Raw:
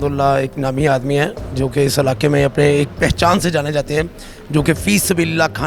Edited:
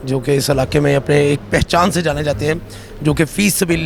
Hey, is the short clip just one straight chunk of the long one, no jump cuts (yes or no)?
yes